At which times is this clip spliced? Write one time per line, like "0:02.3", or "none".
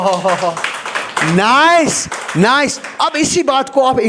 none